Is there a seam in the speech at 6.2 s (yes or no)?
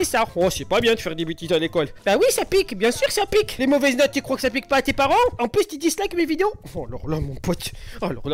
no